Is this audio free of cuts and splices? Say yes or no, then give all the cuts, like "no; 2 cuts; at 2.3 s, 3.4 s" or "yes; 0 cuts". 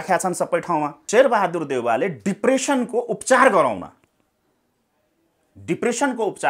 no; 1 cut; at 1.0 s